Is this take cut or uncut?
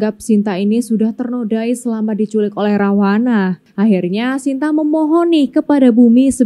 cut